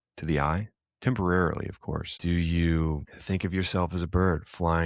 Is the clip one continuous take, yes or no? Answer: no